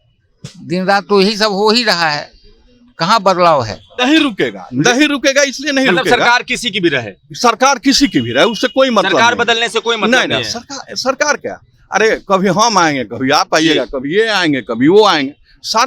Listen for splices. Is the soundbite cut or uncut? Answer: cut